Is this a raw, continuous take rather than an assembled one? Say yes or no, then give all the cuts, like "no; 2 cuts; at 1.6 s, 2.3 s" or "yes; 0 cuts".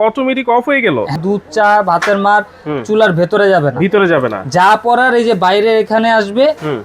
no; 1 cut; at 1.1 s